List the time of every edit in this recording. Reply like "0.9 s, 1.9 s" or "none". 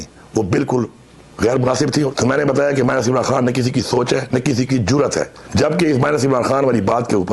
2.1 s, 5.4 s